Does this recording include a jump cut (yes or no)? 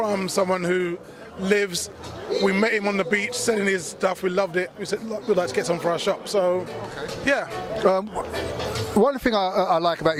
no